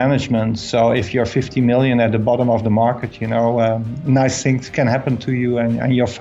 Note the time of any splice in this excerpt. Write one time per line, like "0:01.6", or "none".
none